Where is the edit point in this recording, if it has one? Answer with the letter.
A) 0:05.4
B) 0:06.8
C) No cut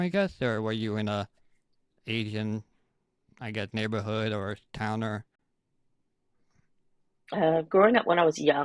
C